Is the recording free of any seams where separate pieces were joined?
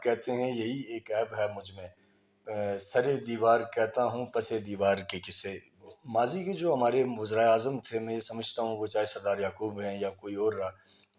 no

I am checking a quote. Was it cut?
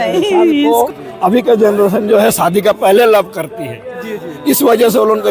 yes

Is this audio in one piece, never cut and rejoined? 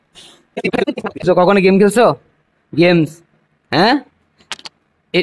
yes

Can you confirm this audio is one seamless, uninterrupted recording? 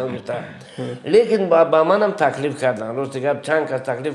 yes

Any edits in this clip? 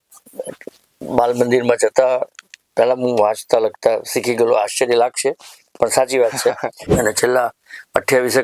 yes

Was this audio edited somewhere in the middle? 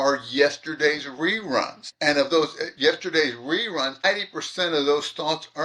yes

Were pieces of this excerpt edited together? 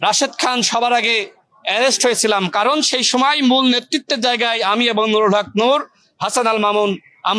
no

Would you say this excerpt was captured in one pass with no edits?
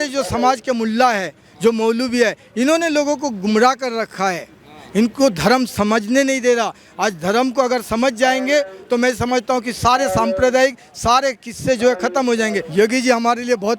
no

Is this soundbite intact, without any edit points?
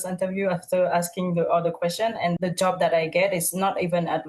yes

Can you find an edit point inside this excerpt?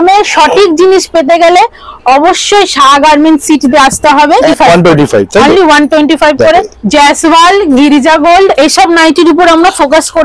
yes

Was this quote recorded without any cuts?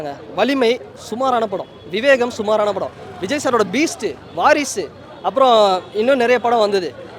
yes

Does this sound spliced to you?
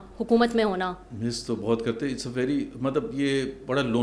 no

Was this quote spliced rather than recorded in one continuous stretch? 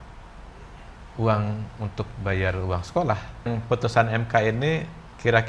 yes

